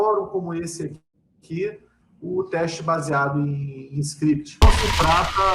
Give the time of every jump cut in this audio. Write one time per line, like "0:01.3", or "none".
0:04.6